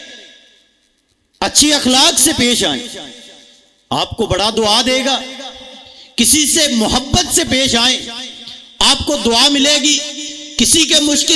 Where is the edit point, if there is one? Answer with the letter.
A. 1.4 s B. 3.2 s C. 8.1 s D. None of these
D